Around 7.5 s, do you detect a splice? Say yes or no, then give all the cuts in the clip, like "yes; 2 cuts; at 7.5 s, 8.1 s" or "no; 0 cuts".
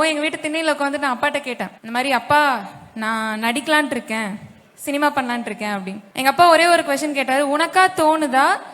no; 2 cuts; at 1.7 s, 6.0 s